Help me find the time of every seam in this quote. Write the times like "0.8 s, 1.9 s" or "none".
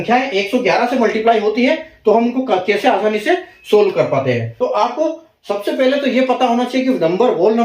4.5 s